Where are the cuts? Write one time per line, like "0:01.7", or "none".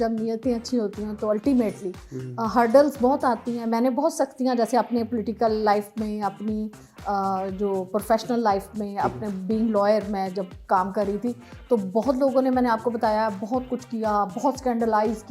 none

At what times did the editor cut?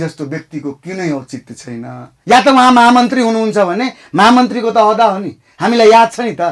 0:02.0

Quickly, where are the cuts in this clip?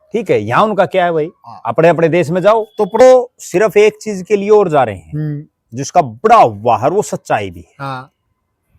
0:03.0

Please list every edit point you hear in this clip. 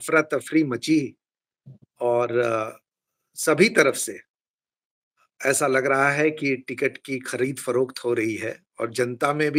none

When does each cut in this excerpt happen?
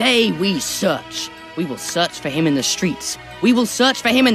none

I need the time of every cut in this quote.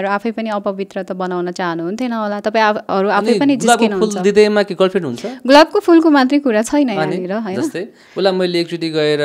none

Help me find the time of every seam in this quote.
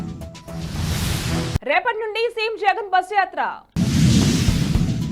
none

